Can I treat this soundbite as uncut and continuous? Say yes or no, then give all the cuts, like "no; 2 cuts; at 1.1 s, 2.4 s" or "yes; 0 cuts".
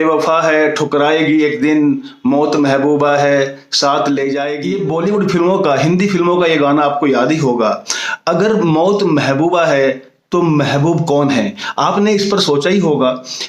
no; 1 cut; at 4.6 s